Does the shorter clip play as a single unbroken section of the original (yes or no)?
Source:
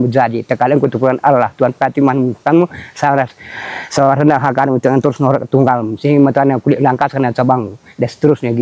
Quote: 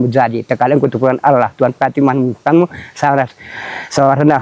yes